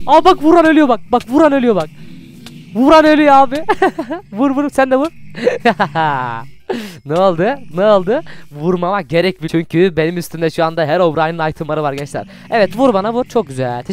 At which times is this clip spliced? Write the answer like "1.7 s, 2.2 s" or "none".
9.5 s